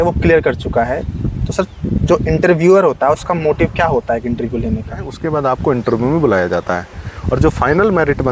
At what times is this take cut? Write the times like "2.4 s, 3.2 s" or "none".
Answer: 5.2 s